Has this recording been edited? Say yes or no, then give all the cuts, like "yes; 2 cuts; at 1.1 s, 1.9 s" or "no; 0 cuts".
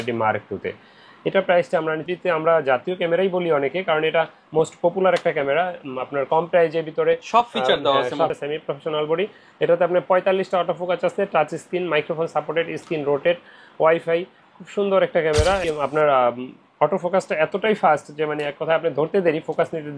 yes; 3 cuts; at 2.0 s, 8.3 s, 15.6 s